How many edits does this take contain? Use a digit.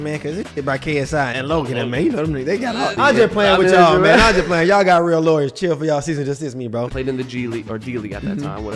3